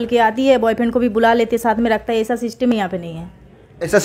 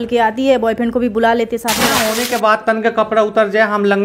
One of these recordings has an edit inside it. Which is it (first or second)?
second